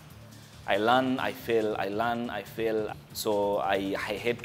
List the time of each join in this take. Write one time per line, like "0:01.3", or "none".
0:02.9

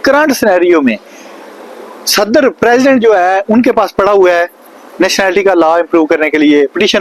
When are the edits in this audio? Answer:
none

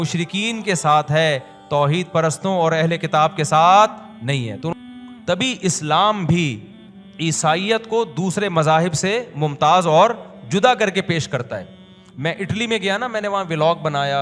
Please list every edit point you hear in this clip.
0:04.7

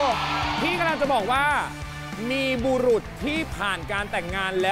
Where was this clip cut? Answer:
none

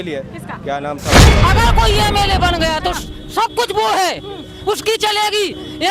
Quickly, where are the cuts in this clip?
0:01.4

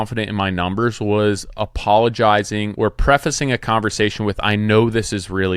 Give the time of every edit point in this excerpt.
0:02.7

